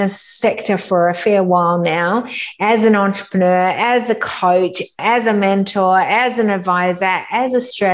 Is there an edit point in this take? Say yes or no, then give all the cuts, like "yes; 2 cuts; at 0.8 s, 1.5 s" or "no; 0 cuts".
yes; 1 cut; at 5.0 s